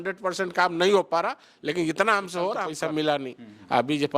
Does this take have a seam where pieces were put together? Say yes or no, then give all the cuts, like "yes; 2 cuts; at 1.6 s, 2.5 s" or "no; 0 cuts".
yes; 1 cut; at 2.7 s